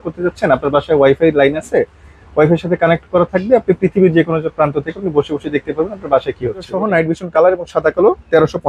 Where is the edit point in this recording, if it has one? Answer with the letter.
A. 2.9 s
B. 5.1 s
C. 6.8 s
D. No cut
C